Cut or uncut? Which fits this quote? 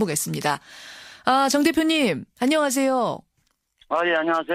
uncut